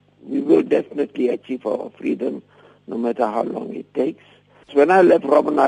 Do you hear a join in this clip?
yes; 1 cut; at 4.7 s

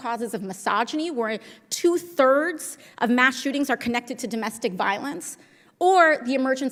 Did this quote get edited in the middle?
no; 0 cuts

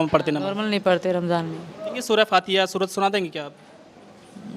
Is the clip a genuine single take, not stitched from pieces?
no; 1 cut; at 2.0 s

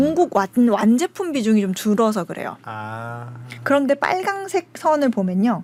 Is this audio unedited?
yes; 0 cuts

